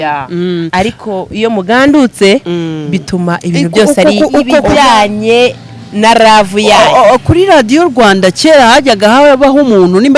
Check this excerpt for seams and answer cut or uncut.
cut